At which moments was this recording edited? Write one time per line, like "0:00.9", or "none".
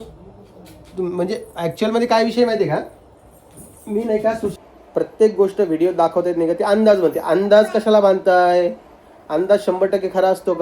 0:04.5